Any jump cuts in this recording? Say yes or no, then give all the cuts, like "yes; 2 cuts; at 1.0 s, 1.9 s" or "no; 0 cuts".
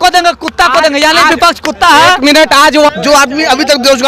yes; 1 cut; at 2.9 s